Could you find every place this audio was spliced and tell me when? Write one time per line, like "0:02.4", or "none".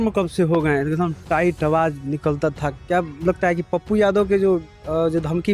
none